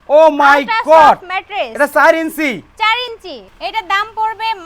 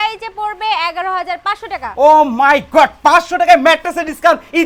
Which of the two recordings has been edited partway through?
first; 1 cut; at 3.4 s

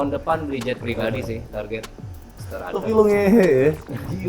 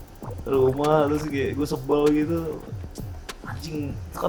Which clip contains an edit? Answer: first; 1 cut; at 2.3 s

